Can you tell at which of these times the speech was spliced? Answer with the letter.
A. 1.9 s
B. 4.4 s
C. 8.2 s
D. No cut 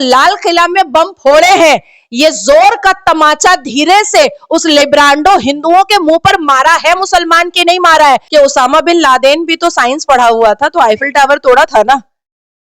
C